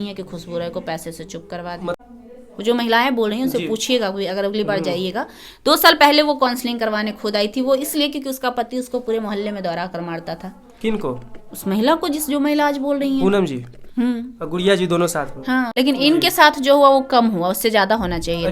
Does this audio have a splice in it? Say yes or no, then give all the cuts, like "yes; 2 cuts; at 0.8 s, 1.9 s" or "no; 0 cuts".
yes; 2 cuts; at 2.0 s, 15.7 s